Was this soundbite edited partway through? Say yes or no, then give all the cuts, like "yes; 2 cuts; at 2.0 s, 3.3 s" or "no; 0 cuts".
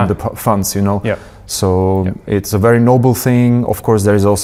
no; 0 cuts